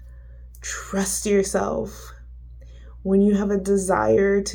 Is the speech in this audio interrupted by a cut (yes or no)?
no